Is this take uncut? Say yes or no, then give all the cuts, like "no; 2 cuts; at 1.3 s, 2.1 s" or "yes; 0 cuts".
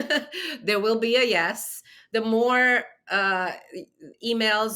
yes; 0 cuts